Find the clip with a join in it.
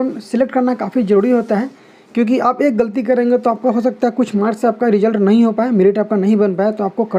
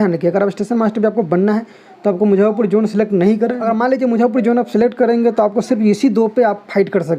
second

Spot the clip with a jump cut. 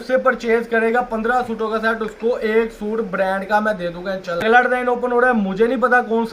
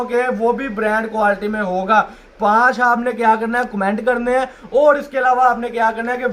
first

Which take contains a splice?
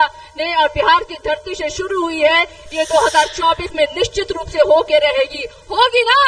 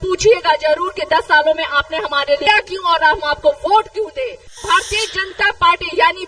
second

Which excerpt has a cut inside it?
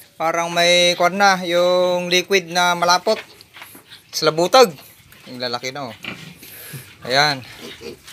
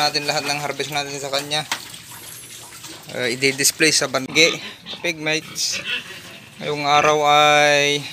second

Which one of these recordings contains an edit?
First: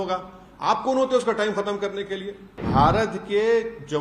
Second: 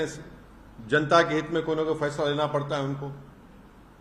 first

